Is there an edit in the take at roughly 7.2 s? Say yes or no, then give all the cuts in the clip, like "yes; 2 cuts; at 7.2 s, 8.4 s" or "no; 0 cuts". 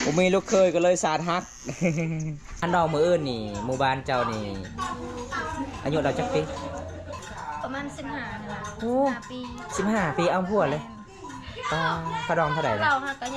yes; 2 cuts; at 2.6 s, 7.2 s